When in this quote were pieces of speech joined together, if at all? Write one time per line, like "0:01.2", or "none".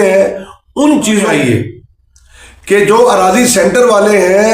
0:01.3